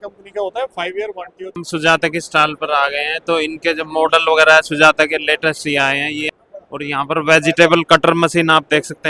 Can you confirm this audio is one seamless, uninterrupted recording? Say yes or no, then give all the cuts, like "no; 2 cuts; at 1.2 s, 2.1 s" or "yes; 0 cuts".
no; 2 cuts; at 1.6 s, 6.2 s